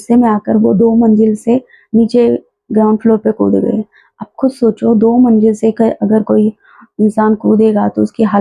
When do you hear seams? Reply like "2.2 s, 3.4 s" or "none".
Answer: none